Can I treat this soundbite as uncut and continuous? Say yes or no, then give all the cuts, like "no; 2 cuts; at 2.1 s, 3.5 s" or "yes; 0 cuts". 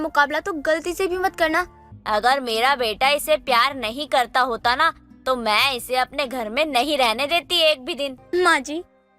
no; 2 cuts; at 1.9 s, 8.2 s